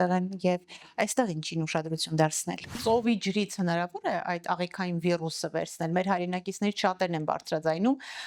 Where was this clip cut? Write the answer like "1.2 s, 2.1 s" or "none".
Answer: 2.8 s